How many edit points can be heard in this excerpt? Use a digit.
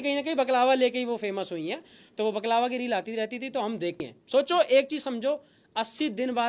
1